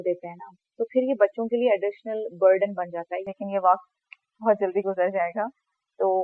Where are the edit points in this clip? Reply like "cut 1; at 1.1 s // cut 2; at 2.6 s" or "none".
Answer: cut 1; at 3.1 s